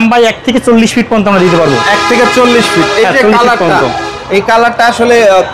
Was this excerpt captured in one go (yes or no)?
yes